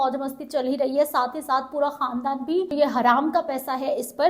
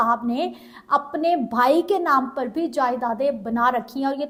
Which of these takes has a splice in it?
first; 1 cut; at 2.7 s

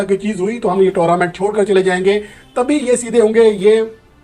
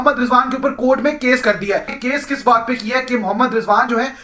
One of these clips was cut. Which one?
second; 1 cut; at 1.9 s

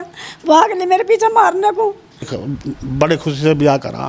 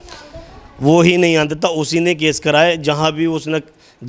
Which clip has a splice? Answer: first; 1 cut; at 2.3 s

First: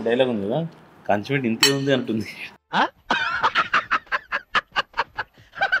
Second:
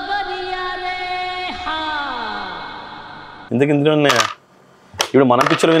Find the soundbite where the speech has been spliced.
second; 1 cut; at 3.4 s

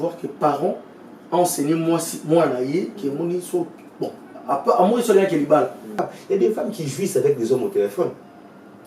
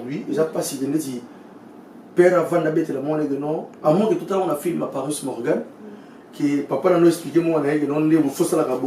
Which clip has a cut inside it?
first; 1 cut; at 5.9 s

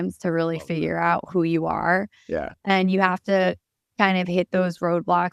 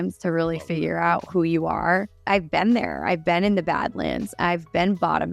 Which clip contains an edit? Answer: second; 1 cut; at 2.1 s

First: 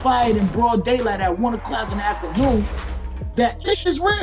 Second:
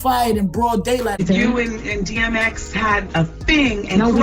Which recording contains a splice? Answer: second; 1 cut; at 1.2 s

